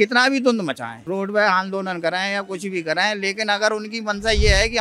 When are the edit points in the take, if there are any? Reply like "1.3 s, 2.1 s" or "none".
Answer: 0.9 s